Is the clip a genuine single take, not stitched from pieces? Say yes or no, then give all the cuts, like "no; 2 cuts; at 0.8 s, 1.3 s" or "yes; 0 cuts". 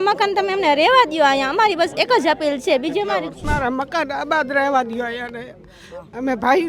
no; 1 cut; at 3.4 s